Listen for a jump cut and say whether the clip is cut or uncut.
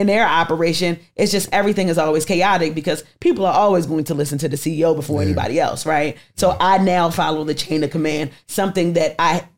uncut